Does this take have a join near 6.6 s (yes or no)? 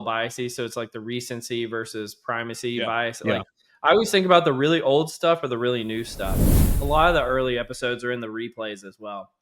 yes